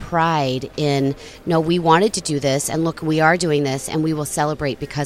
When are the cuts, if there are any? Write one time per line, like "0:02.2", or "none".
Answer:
none